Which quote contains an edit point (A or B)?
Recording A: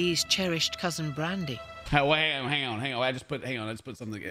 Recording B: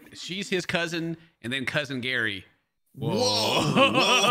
A